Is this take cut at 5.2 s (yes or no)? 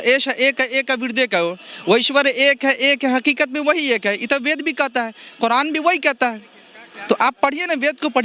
no